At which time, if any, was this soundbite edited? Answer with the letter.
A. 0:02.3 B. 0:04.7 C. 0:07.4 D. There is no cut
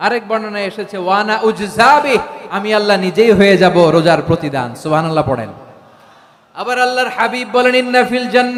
D